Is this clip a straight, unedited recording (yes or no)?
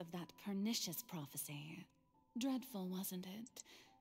yes